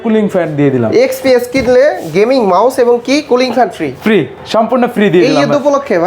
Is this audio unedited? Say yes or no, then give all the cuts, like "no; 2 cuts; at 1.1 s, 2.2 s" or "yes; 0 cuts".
yes; 0 cuts